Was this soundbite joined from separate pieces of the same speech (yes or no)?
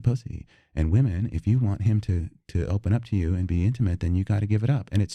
no